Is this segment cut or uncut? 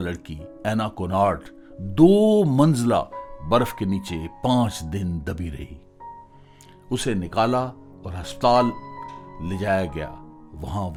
uncut